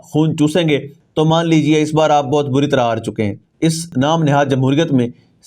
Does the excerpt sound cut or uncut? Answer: cut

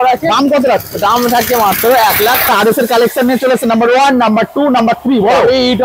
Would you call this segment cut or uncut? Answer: cut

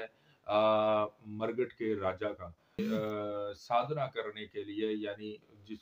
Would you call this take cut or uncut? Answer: cut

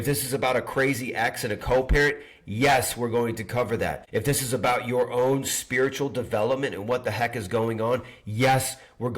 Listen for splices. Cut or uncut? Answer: cut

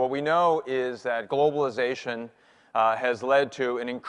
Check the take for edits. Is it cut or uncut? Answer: uncut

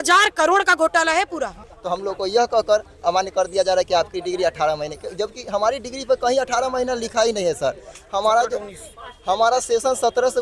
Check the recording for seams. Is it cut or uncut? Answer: cut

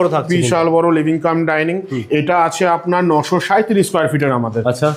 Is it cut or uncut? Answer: uncut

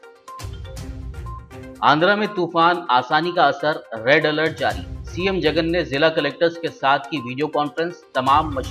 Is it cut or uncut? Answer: cut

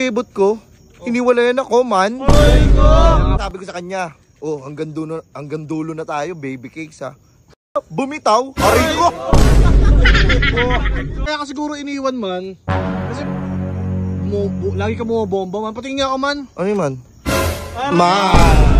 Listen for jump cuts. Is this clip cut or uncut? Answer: cut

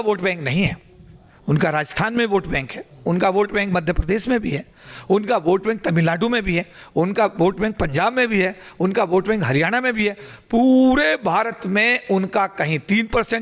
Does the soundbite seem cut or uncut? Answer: uncut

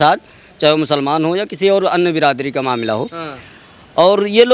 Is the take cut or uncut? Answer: uncut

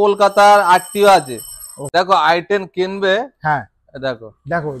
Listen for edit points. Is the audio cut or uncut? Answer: cut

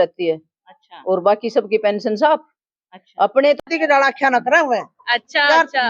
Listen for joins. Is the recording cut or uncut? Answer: cut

